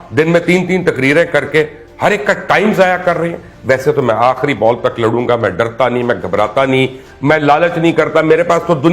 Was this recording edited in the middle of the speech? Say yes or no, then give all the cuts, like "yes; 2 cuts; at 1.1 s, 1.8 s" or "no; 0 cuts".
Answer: yes; 1 cut; at 3.5 s